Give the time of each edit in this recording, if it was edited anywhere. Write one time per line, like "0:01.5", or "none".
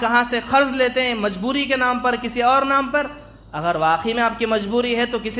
none